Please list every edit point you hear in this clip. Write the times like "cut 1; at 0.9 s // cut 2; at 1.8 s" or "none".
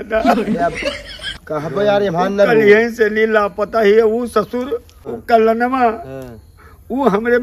cut 1; at 5.2 s